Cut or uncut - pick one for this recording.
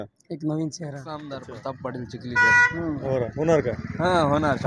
cut